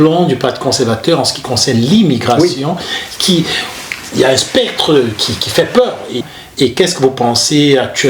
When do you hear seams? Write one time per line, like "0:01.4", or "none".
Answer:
0:03.9
0:06.2